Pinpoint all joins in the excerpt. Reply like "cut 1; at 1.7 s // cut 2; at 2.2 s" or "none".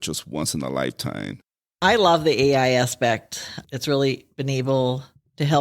cut 1; at 1.8 s